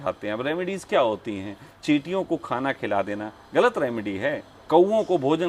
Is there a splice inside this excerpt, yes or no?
yes